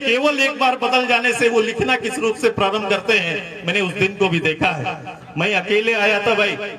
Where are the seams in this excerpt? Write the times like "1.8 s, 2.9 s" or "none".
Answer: none